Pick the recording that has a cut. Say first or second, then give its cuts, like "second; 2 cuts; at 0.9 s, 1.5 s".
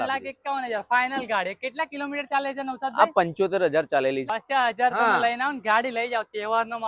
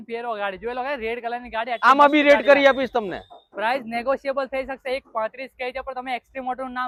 first; 1 cut; at 4.3 s